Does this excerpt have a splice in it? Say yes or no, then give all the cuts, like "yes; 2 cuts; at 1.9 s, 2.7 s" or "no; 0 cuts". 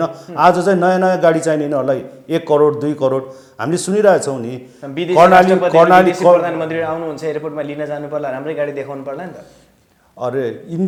no; 0 cuts